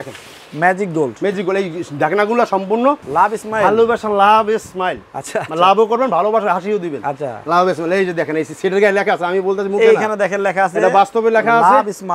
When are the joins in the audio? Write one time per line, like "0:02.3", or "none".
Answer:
0:03.1